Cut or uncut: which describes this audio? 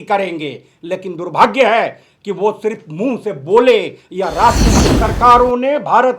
cut